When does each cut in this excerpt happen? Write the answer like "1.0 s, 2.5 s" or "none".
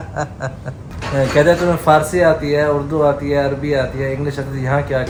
none